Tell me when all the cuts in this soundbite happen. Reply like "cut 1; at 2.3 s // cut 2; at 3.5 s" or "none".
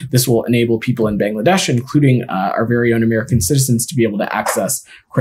none